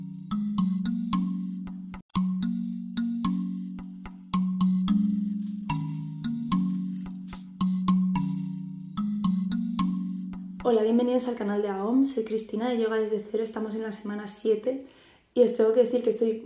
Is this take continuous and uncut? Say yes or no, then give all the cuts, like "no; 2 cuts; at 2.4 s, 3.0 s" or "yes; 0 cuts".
yes; 0 cuts